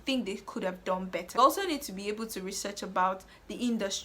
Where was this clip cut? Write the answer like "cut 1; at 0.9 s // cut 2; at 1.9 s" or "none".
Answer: cut 1; at 1.4 s